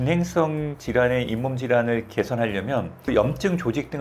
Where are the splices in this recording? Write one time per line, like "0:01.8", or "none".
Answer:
0:03.1